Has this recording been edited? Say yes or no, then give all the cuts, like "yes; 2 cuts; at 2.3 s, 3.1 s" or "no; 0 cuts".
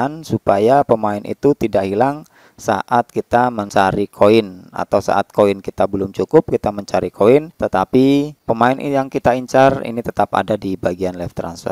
yes; 3 cuts; at 3.6 s, 7.6 s, 8.4 s